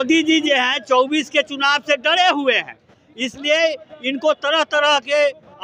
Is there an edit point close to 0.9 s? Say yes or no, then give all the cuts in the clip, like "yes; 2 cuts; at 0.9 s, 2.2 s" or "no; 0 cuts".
no; 0 cuts